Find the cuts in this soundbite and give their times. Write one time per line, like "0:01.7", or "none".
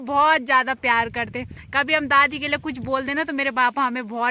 none